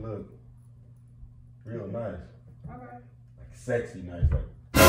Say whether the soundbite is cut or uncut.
uncut